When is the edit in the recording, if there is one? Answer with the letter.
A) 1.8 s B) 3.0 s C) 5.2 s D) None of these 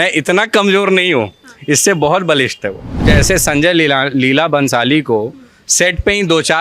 B